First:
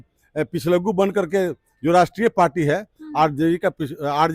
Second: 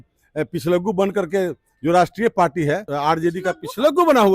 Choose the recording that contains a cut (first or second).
second